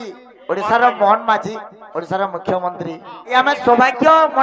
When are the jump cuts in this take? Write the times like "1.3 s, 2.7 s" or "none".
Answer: 3.3 s